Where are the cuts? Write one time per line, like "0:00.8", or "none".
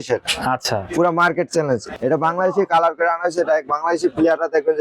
0:01.9